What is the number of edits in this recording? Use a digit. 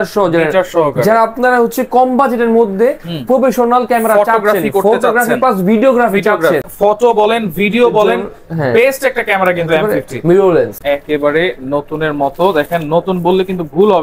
2